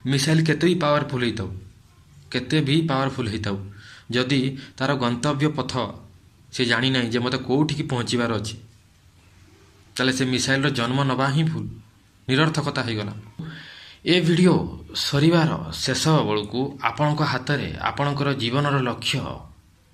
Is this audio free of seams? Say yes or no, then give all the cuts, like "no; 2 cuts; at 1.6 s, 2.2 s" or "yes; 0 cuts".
no; 1 cut; at 13.5 s